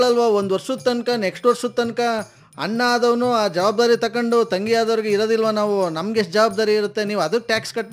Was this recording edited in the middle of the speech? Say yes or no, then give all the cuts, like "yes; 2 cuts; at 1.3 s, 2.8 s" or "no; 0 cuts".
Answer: no; 0 cuts